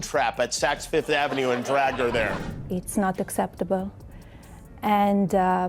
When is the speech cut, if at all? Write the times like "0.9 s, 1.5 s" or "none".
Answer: 2.4 s